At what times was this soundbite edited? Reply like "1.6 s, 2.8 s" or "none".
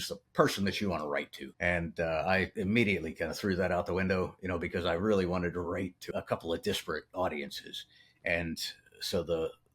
1.4 s, 2.5 s, 6.1 s